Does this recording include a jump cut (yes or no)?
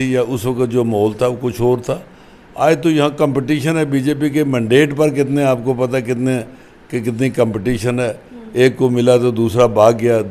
no